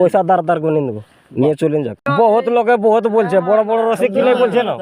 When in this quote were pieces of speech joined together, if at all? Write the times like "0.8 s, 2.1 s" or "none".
2.1 s

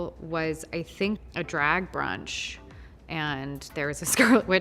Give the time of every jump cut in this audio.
1.2 s

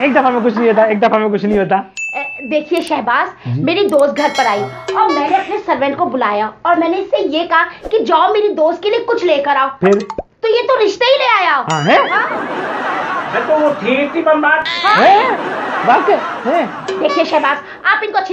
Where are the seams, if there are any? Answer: 16.7 s

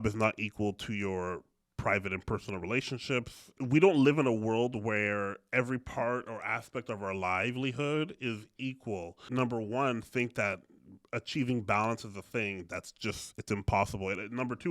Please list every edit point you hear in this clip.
3.6 s, 9.2 s

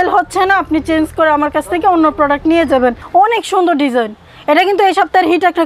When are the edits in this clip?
3.0 s

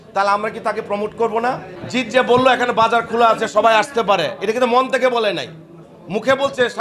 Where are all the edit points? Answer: 1.7 s

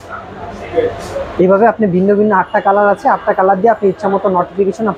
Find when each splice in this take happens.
none

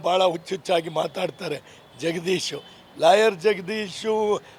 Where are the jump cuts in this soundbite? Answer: none

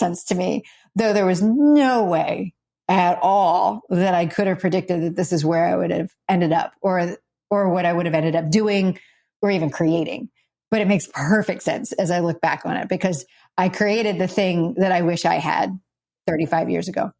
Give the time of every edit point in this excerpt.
16.1 s

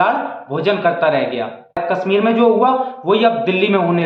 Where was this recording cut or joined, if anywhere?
1.8 s

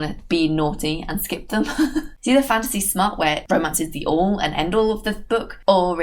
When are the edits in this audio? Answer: 2.1 s

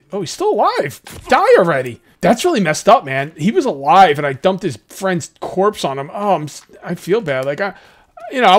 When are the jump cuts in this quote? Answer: 2.0 s

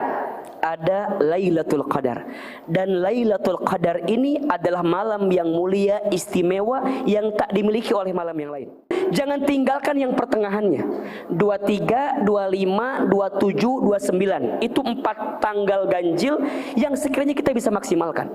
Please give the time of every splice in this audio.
8.9 s

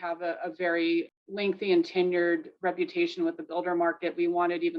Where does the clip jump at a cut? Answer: 1.2 s

